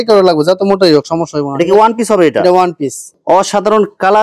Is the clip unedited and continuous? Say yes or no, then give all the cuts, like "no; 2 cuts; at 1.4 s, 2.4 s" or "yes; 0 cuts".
yes; 0 cuts